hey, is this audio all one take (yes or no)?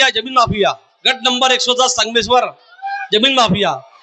yes